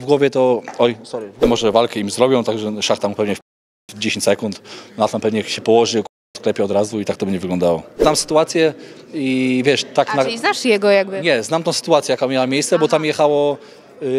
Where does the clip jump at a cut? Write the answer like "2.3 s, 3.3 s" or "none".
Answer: 1.4 s, 8.0 s